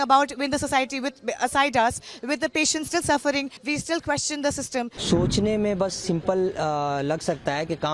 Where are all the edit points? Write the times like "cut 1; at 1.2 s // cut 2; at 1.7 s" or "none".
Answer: cut 1; at 3.6 s // cut 2; at 5.0 s